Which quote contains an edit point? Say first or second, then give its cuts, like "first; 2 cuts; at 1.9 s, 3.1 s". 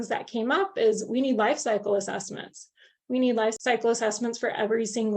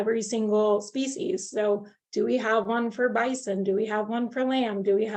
first; 1 cut; at 3.6 s